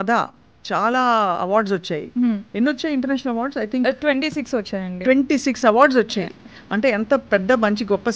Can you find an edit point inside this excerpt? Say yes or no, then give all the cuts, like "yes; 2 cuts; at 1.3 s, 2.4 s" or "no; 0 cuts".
no; 0 cuts